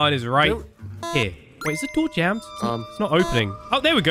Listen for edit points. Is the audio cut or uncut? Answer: cut